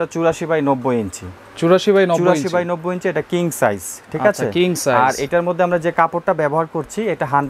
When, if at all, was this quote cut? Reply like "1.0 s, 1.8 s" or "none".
none

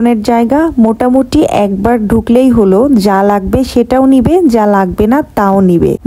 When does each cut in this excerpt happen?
none

